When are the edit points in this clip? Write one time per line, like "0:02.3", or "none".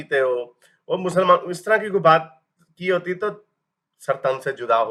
none